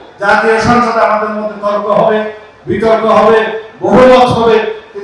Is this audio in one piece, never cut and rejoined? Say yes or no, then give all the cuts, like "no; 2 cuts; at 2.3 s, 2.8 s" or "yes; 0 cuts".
yes; 0 cuts